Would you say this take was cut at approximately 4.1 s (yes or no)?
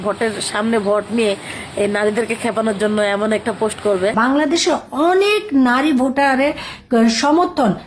yes